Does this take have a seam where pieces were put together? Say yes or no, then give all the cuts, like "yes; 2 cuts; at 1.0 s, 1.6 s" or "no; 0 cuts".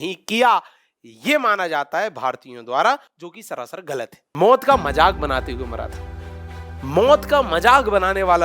yes; 1 cut; at 4.2 s